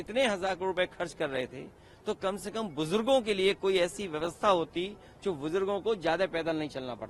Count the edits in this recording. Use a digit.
0